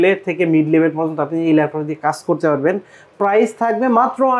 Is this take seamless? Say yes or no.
yes